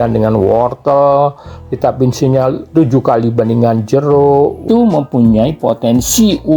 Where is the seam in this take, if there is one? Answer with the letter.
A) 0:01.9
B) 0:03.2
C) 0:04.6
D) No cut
C